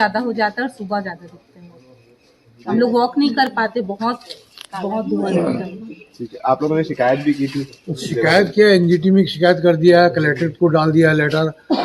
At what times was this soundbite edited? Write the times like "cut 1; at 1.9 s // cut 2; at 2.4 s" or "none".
none